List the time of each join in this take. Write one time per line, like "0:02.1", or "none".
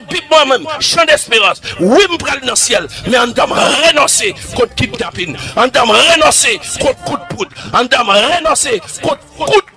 none